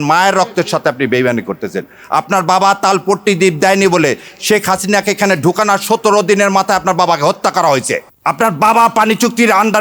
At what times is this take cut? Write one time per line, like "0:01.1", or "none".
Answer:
0:08.1